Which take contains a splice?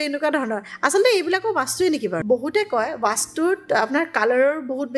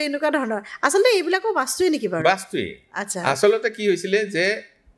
first; 1 cut; at 2.2 s

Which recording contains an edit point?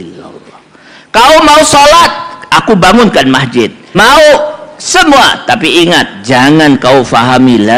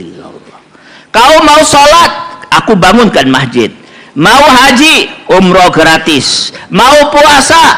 first; 1 cut; at 3.8 s

